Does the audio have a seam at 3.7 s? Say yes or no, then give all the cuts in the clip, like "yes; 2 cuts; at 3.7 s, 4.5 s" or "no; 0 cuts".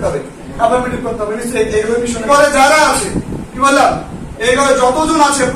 no; 1 cut; at 2.3 s